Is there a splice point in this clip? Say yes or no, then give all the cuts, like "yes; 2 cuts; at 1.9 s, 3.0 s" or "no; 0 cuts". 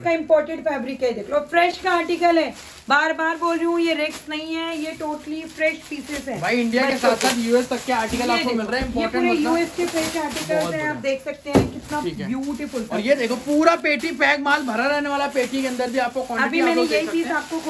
no; 0 cuts